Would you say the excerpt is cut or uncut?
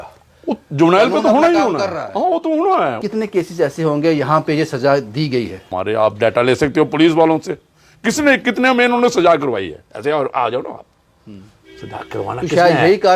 cut